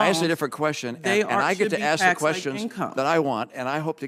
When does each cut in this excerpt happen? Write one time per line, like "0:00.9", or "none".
none